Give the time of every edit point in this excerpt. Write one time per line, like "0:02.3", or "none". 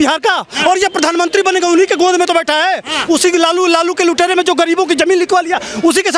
none